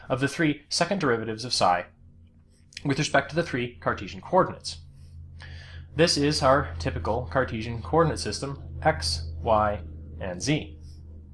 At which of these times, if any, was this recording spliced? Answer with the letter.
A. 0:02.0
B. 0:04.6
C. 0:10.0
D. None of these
B